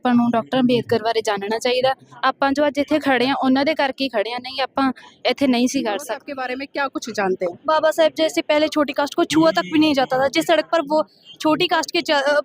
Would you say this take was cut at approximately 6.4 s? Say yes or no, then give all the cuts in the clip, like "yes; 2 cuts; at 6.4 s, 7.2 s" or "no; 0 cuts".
yes; 1 cut; at 6.4 s